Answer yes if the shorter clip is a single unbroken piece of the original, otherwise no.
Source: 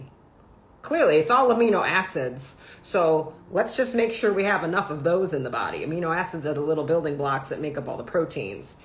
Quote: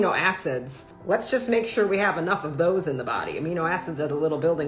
no